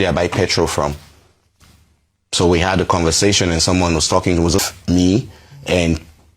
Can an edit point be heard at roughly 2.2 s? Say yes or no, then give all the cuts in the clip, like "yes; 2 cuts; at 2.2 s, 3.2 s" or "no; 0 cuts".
no; 1 cut; at 4.6 s